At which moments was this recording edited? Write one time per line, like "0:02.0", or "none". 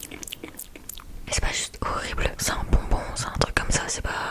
0:01.3
0:02.4